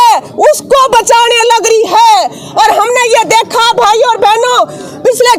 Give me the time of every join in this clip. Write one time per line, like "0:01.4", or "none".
none